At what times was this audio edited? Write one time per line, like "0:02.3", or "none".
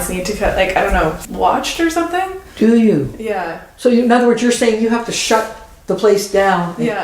0:01.2